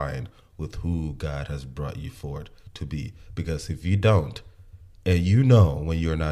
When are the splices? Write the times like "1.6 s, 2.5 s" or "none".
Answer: none